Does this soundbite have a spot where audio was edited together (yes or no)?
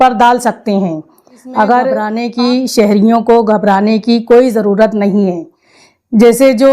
yes